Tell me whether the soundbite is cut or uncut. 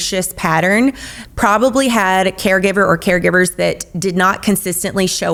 uncut